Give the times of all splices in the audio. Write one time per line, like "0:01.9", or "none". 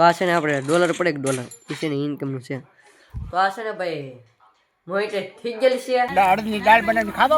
0:06.1